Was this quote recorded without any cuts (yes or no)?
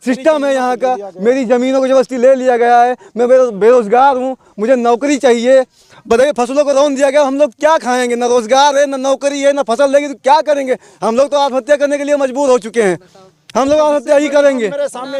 yes